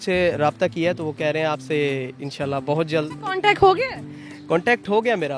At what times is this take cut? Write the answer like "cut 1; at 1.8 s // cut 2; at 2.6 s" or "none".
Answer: none